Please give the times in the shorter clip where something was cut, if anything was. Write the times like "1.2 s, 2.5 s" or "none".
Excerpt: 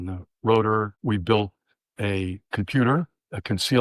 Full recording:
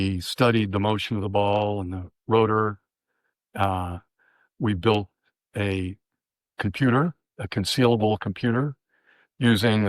0.9 s, 2.4 s